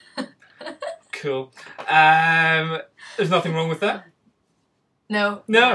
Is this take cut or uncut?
uncut